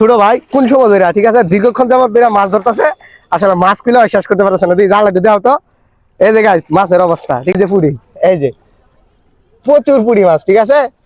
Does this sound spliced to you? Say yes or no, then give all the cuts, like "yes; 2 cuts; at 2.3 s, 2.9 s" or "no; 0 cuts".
no; 0 cuts